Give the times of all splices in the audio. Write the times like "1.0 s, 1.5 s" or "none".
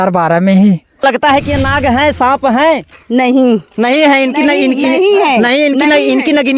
1.0 s

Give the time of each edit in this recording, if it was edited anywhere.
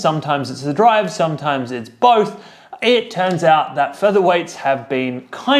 4.3 s

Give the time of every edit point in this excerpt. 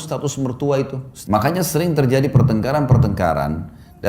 1.1 s

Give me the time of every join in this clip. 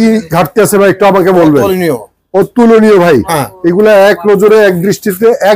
none

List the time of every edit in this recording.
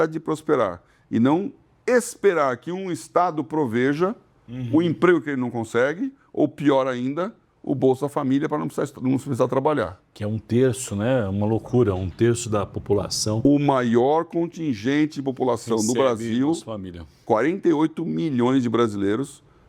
17.2 s

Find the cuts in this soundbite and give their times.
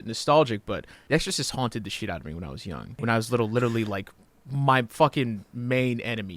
0.9 s, 3.0 s

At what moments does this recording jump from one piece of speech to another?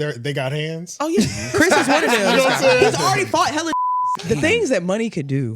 3.9 s

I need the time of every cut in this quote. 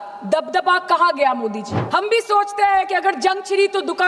1.7 s

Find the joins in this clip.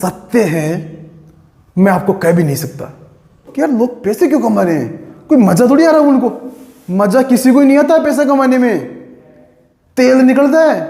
3.4 s

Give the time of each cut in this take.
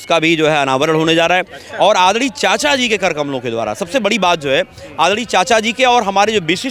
none

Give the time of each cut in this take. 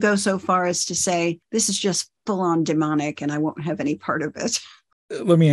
1.4 s, 4.7 s

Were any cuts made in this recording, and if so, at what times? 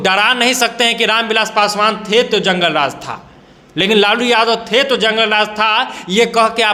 none

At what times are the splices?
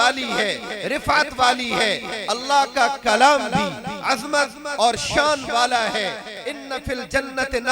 6.4 s

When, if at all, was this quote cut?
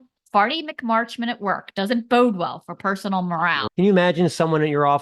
3.7 s

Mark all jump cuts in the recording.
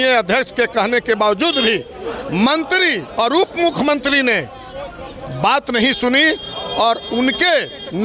none

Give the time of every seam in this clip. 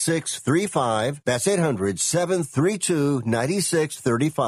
1.2 s

